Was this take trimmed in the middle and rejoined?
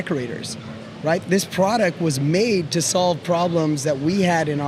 no; 0 cuts

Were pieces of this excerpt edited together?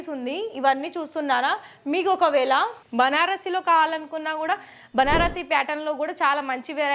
no; 0 cuts

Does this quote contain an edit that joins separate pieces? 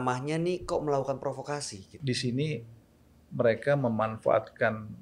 yes; 1 cut; at 1.9 s

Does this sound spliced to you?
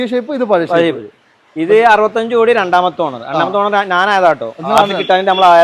no; 0 cuts

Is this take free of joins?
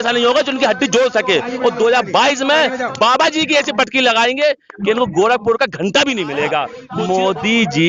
no; 1 cut; at 6.8 s

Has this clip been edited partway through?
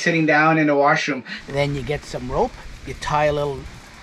yes; 1 cut; at 1.3 s

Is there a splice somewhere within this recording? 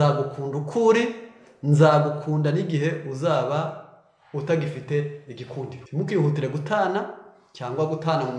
yes; 1 cut; at 5.8 s

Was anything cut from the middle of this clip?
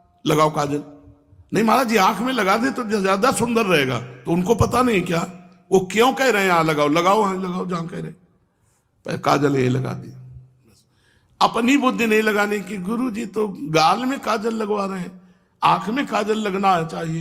no; 0 cuts

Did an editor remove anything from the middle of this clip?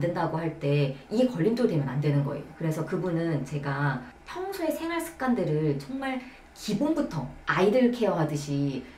no; 0 cuts

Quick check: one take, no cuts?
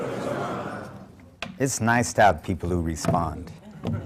yes; 0 cuts

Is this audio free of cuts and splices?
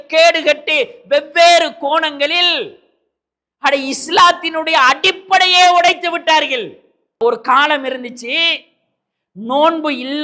no; 1 cut; at 7.2 s

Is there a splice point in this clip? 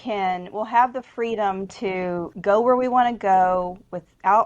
yes; 1 cut; at 2.3 s

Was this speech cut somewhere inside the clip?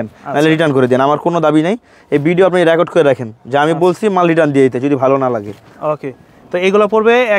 no; 0 cuts

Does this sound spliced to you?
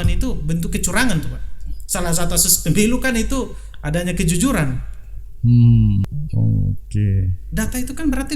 yes; 1 cut; at 6.1 s

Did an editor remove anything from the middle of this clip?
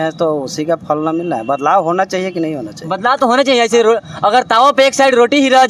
no; 0 cuts

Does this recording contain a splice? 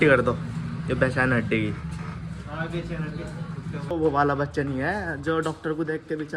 yes; 1 cut; at 3.9 s

